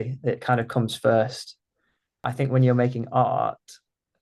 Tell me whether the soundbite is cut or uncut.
cut